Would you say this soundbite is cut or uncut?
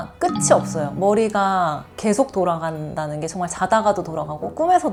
uncut